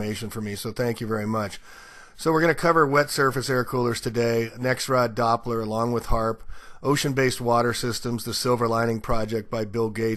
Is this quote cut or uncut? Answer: uncut